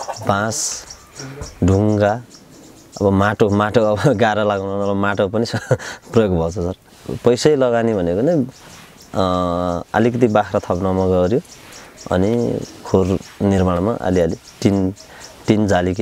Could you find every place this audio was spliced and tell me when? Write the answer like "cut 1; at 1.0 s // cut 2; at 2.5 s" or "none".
cut 1; at 6.8 s